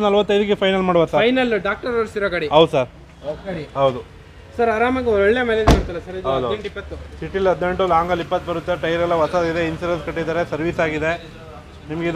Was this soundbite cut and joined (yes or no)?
yes